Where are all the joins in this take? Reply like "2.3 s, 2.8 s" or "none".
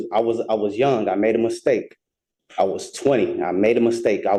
none